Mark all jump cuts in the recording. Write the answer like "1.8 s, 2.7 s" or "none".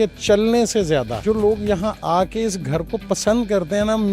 1.1 s

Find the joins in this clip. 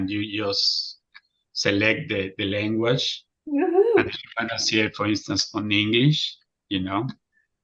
none

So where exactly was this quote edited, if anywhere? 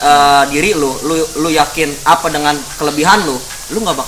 none

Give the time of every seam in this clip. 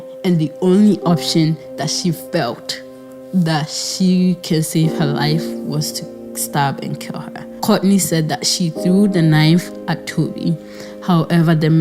7.6 s

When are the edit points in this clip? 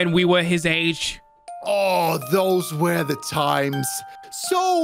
none

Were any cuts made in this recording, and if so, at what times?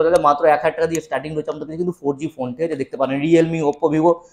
none

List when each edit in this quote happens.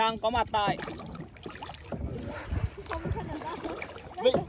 none

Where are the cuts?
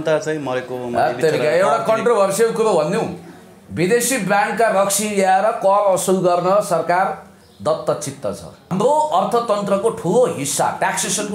8.7 s

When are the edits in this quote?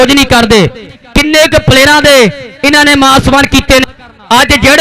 3.8 s

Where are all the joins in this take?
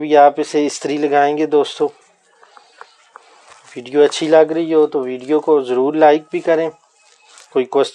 none

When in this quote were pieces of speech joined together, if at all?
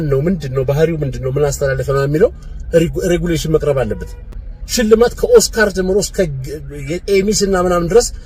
none

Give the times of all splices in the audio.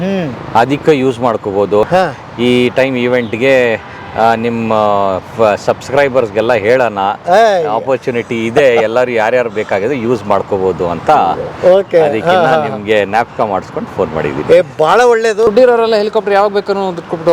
1.9 s, 15.5 s

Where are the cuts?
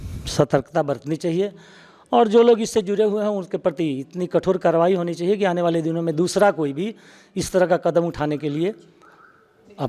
none

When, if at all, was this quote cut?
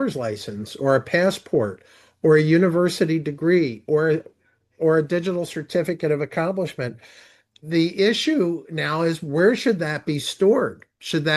7.6 s

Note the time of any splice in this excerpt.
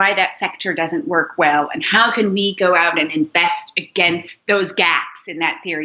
4.3 s

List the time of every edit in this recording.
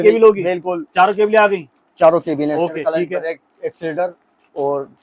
none

